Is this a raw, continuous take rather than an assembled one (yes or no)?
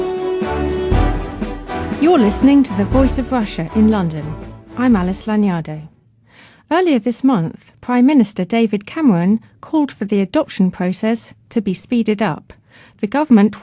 yes